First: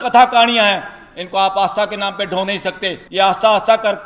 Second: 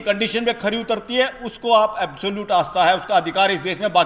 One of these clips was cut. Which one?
first; 1 cut; at 3.0 s

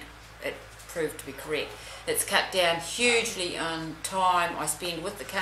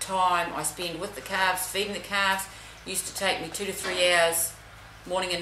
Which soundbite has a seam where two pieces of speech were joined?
first; 1 cut; at 1.8 s

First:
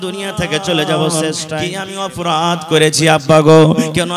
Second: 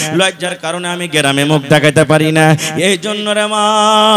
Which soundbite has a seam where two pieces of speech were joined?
first; 1 cut; at 1.5 s

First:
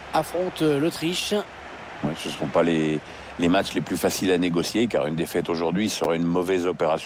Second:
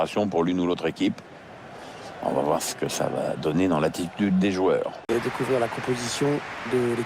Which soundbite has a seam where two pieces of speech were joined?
second; 1 cut; at 5.1 s

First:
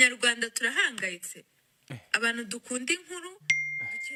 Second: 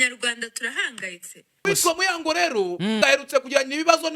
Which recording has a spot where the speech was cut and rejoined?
second; 2 cuts; at 1.7 s, 3.0 s

